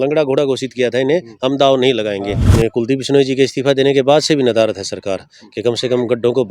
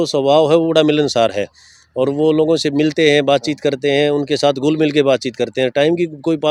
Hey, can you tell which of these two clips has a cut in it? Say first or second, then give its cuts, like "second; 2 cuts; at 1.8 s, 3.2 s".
first; 1 cut; at 2.4 s